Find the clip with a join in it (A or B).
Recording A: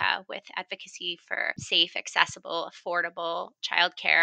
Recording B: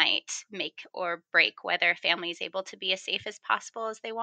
A